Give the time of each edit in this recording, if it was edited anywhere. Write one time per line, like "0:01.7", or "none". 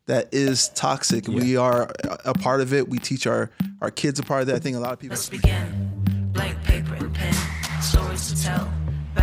0:05.0